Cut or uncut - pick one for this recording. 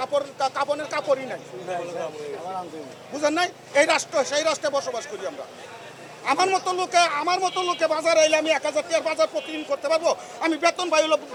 uncut